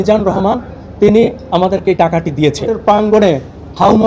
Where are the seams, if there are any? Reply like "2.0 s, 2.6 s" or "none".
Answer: 2.7 s